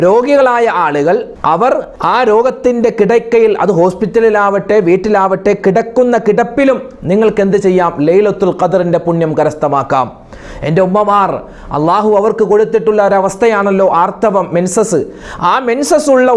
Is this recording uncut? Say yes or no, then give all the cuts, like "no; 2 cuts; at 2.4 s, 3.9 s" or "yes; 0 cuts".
no; 1 cut; at 1.7 s